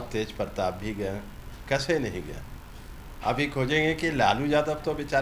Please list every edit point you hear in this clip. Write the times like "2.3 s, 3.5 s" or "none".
none

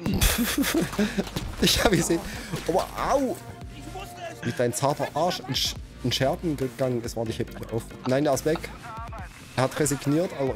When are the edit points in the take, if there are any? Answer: none

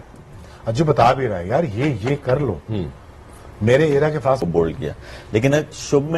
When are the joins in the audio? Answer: 4.4 s

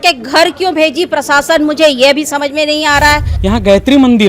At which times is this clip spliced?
3.3 s

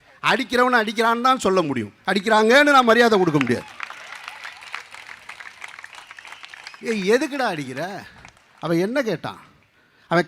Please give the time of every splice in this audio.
none

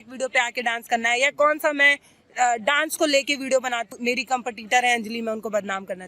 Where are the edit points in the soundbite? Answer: 3.9 s

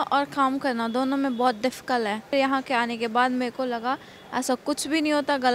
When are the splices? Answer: 2.3 s

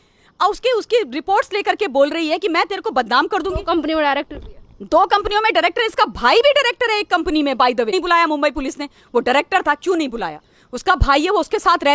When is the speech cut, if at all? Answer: 7.9 s

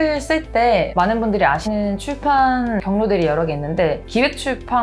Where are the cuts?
1.6 s, 2.8 s

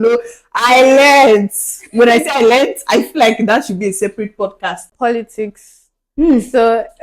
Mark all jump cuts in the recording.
4.9 s

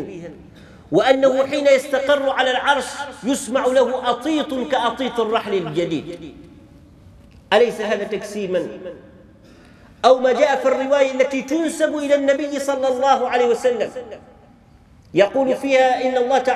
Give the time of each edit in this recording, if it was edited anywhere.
none

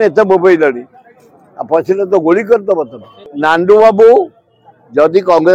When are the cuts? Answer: 3.2 s

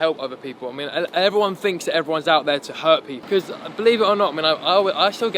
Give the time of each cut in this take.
3.2 s

